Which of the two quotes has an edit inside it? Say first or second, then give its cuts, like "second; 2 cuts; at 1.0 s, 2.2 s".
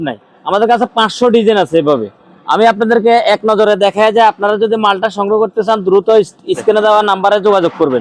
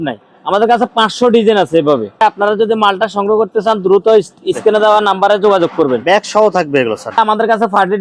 second; 2 cuts; at 2.2 s, 7.2 s